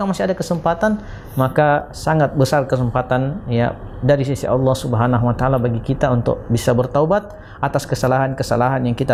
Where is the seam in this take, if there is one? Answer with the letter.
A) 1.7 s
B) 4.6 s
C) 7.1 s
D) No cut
D